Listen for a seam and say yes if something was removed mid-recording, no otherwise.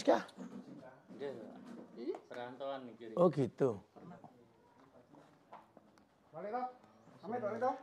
yes